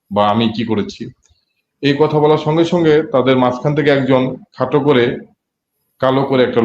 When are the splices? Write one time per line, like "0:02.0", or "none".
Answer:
none